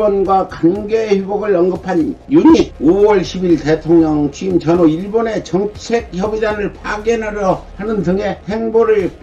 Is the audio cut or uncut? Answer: uncut